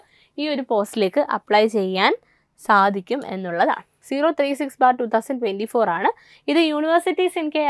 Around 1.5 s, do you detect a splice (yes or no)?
no